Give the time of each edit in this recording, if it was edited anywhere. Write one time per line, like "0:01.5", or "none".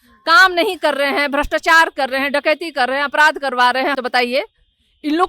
0:04.0

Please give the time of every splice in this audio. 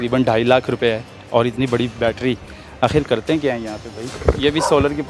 0:01.1
0:04.1

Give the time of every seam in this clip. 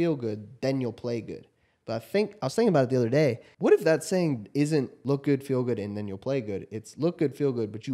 0:03.5
0:05.0

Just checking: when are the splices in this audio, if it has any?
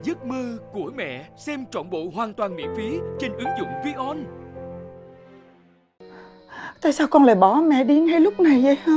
0:05.9

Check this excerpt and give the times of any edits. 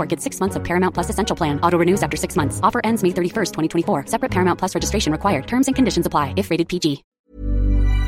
0:07.2

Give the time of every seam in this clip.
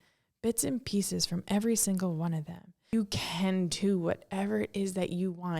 0:02.9

